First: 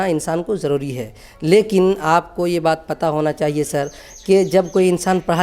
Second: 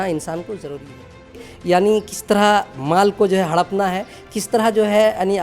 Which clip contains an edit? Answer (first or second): second